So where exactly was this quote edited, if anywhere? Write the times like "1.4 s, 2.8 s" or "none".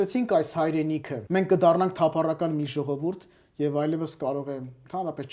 1.1 s